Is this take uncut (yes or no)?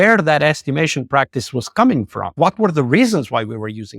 no